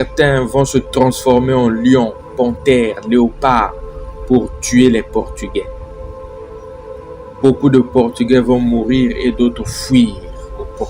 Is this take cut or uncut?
cut